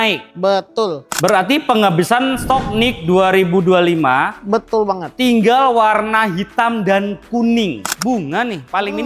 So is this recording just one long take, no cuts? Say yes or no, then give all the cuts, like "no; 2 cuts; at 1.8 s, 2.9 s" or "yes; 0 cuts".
no; 2 cuts; at 1.1 s, 7.8 s